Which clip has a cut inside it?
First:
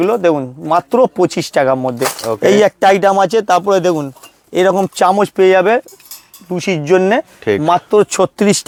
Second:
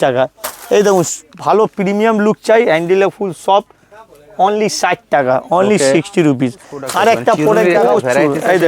second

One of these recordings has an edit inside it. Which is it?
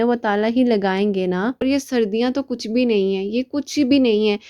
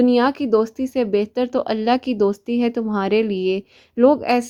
first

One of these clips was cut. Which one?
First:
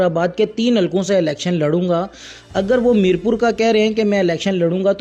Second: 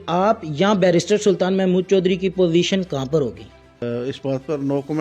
second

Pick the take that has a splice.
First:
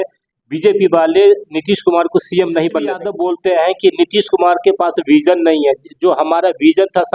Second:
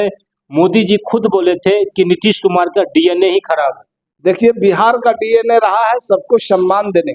first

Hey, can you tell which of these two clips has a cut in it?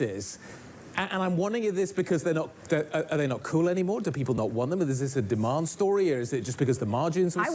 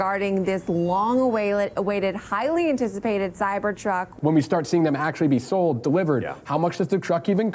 second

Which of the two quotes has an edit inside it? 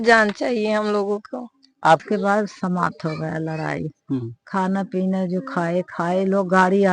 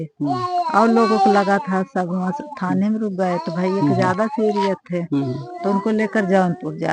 first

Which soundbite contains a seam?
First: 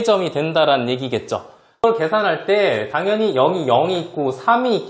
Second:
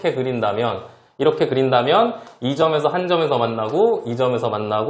first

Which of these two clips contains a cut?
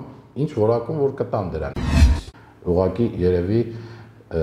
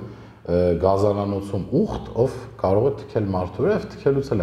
first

